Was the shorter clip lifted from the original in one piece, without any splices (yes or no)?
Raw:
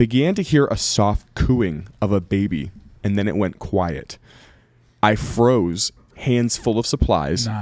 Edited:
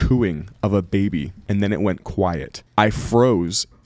no